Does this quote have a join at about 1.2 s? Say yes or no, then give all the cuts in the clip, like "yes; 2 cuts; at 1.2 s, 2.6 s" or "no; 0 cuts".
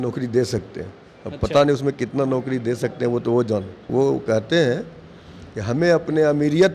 no; 1 cut; at 3.8 s